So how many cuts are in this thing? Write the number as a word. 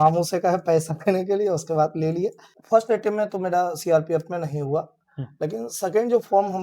one